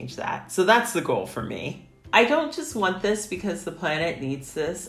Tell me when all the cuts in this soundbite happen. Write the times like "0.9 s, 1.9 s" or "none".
1.7 s

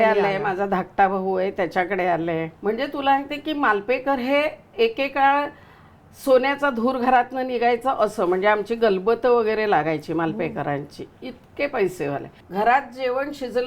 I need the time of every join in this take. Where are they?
2.5 s, 12.4 s

